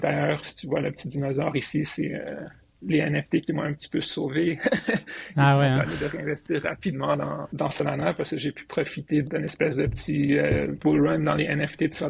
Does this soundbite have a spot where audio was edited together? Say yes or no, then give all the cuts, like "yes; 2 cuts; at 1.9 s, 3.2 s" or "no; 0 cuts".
yes; 3 cuts; at 7.4 s, 9.2 s, 10.7 s